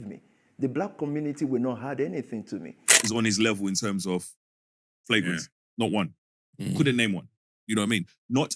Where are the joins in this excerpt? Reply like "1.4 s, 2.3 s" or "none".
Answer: 2.9 s